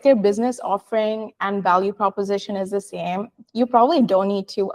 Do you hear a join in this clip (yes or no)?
no